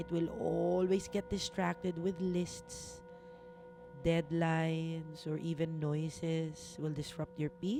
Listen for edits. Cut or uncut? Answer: uncut